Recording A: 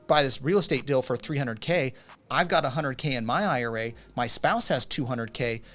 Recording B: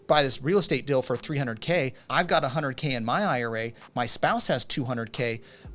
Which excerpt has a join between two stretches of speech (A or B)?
B